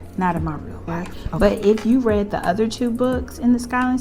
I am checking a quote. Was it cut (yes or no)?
yes